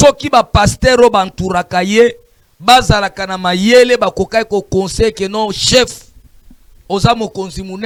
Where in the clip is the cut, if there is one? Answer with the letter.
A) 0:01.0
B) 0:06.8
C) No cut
C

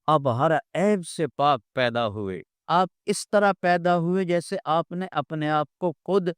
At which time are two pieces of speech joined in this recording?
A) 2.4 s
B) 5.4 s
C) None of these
A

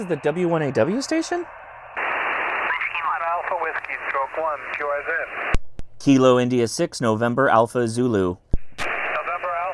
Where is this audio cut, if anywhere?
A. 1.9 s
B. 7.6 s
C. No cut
A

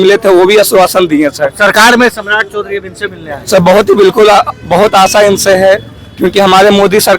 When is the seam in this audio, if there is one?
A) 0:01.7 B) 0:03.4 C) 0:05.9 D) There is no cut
D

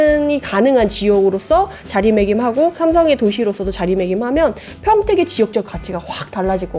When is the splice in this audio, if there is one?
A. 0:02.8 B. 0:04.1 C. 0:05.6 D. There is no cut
A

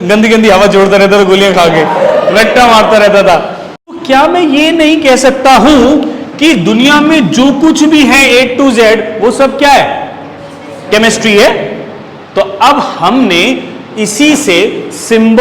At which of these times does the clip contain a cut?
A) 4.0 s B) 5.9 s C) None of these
A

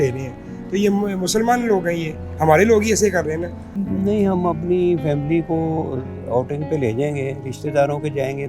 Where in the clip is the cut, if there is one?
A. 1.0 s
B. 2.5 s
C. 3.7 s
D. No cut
C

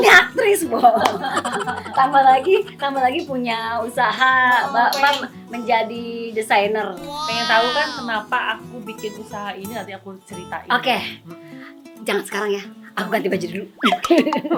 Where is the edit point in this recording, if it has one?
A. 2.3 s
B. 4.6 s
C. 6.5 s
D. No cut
D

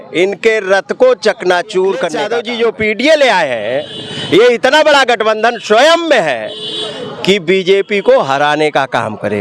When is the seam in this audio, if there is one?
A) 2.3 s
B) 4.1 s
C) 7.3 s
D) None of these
A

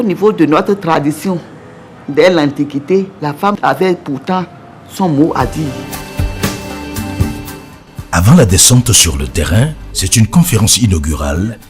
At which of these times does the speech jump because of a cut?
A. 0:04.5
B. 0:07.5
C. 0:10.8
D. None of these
B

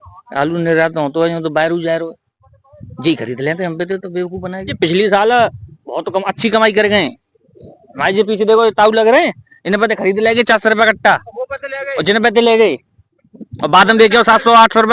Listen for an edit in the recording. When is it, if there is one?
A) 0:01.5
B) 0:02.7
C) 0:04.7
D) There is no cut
C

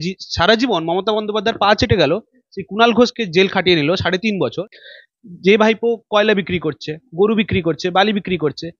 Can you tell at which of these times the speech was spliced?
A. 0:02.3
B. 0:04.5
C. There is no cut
B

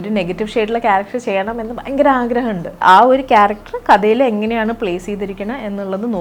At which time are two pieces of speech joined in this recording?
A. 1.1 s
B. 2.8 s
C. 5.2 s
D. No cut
B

